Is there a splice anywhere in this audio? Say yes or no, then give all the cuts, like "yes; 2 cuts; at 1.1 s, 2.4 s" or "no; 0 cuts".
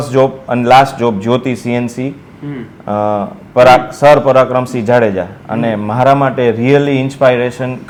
no; 0 cuts